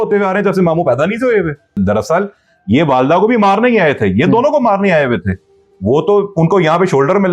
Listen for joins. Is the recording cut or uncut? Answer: cut